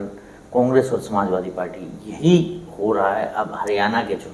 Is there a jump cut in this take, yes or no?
no